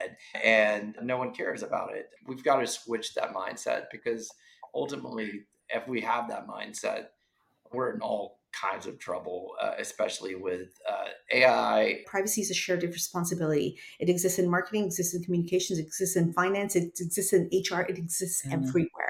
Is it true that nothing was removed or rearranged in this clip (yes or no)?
no